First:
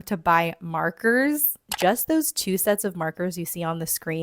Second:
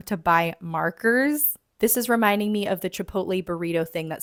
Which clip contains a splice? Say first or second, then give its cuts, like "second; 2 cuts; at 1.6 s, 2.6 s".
first; 1 cut; at 1.7 s